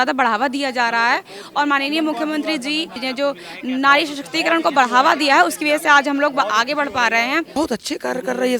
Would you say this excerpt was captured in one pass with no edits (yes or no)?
no